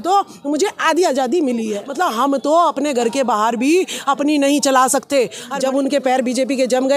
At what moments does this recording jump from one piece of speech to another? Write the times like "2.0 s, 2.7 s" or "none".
1.8 s, 5.4 s